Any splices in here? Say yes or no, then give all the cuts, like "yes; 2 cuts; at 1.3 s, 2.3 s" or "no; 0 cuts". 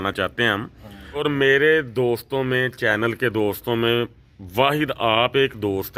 yes; 1 cut; at 1.2 s